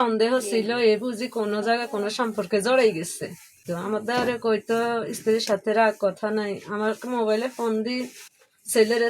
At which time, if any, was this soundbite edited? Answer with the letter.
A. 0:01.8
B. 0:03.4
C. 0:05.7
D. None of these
D